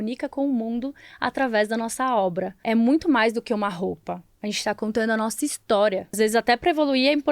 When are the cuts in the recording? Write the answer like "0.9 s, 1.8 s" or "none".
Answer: 2.6 s, 6.1 s